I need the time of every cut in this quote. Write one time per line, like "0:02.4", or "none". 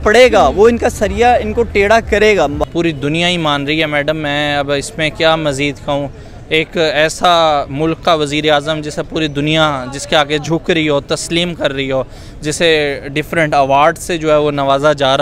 0:02.6